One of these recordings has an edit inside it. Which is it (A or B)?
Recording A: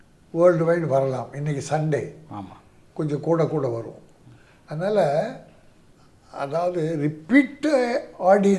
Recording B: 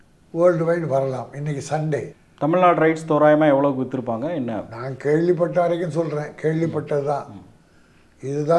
B